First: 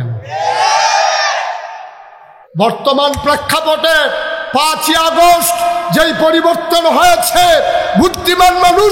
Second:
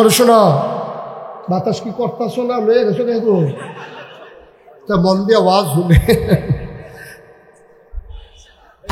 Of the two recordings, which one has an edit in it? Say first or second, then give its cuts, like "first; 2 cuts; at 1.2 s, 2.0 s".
first; 1 cut; at 2.4 s